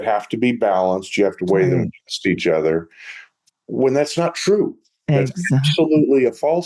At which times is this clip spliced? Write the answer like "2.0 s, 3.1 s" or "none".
none